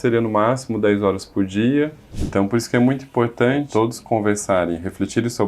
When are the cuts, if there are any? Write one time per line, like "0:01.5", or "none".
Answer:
0:02.1
0:03.7